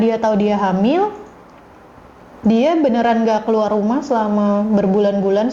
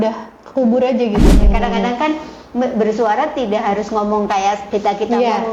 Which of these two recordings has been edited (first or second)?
second